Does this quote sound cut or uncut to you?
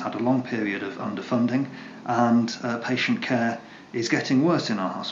uncut